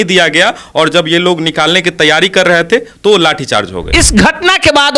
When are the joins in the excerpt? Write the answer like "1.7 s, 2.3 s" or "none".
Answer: 3.8 s